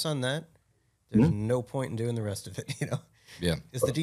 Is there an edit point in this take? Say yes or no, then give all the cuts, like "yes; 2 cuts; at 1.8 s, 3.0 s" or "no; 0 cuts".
no; 0 cuts